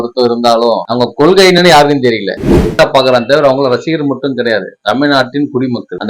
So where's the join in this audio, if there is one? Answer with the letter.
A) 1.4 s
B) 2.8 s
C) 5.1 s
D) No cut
B